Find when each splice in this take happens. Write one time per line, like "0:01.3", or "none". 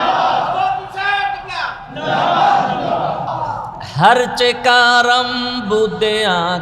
0:03.3

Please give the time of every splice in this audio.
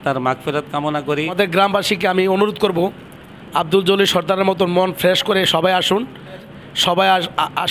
0:01.3
0:06.5

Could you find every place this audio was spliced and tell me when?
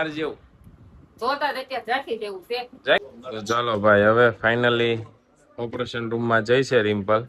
0:03.1

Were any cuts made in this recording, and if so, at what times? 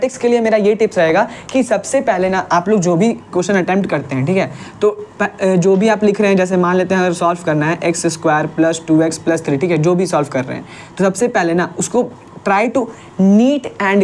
none

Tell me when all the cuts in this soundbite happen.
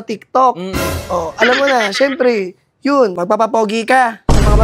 0:03.2

